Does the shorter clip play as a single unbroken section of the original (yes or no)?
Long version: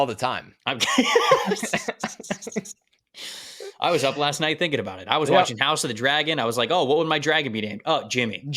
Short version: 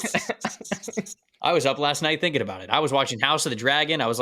no